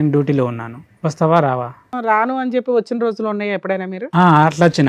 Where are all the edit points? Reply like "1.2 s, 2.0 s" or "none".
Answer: 1.9 s